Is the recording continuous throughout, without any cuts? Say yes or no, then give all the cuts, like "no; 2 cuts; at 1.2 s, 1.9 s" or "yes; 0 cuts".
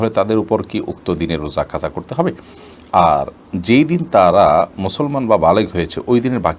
yes; 0 cuts